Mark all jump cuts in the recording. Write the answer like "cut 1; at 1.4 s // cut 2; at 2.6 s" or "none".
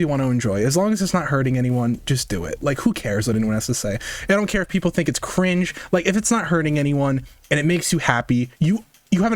none